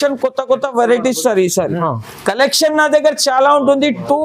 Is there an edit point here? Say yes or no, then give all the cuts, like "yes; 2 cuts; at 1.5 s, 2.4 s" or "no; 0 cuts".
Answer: yes; 1 cut; at 1.8 s